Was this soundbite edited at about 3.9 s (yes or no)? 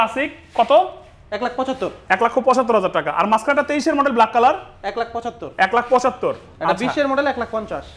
no